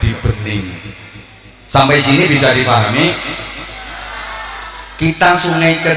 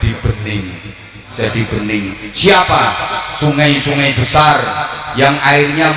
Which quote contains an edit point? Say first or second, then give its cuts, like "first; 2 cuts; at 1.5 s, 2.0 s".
second; 1 cut; at 1.3 s